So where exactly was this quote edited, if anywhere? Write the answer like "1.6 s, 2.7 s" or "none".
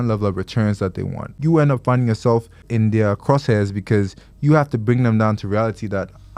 1.3 s, 2.6 s